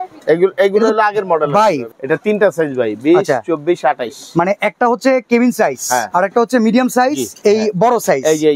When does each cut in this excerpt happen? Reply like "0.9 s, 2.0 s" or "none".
1.9 s, 6.1 s, 7.3 s